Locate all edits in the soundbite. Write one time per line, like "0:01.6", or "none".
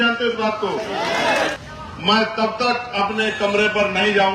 0:01.5